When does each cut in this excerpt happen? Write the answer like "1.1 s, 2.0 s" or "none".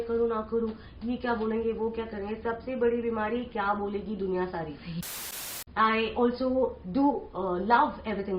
5.4 s